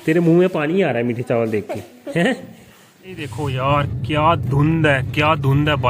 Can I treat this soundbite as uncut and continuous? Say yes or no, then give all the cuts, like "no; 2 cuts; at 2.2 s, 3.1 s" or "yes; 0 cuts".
no; 1 cut; at 3.4 s